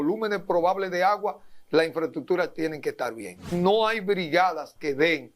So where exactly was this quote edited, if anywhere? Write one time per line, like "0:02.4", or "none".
0:03.5